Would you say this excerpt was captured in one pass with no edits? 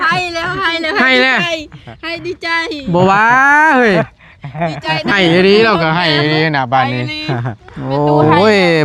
yes; 0 cuts

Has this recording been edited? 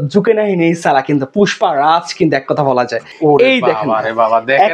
yes; 1 cut; at 3.1 s

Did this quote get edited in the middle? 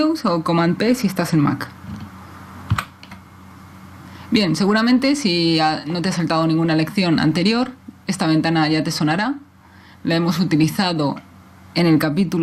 no; 0 cuts

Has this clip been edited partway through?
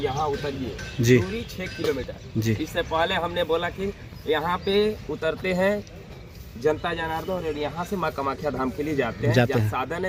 no; 0 cuts

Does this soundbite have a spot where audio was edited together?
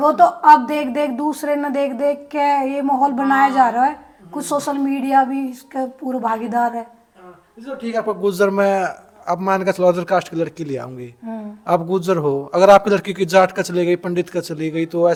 no; 0 cuts

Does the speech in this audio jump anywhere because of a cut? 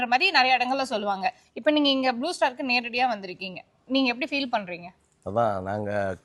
no; 0 cuts

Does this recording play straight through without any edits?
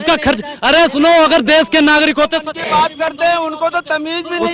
yes; 0 cuts

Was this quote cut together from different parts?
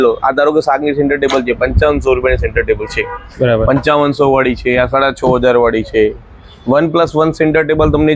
no; 0 cuts

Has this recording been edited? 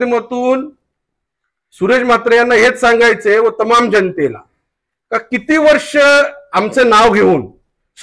no; 0 cuts

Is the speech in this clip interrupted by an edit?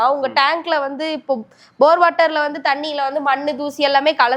no; 0 cuts

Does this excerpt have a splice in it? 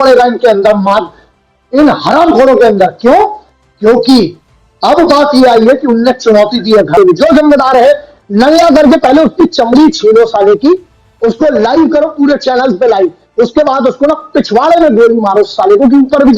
yes; 1 cut; at 7.0 s

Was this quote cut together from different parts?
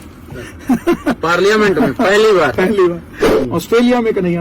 yes; 1 cut; at 3.3 s

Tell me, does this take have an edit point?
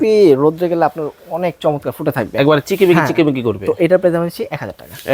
no; 0 cuts

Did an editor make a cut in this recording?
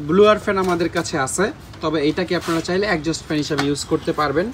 no; 0 cuts

